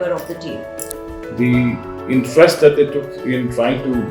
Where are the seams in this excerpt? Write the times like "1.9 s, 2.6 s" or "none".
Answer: 1.1 s